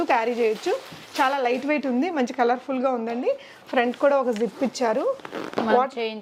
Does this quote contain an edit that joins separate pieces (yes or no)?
no